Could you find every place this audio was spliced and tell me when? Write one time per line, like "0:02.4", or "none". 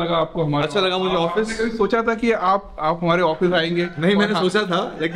none